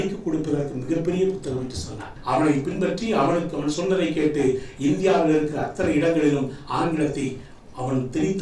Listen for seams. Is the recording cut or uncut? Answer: cut